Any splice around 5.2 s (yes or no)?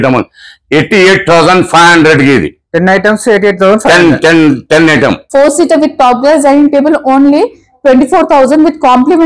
yes